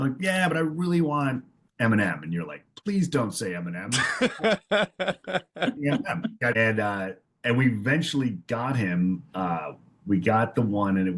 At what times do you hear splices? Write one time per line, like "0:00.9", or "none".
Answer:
0:06.6